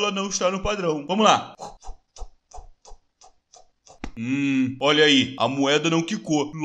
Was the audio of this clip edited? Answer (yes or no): no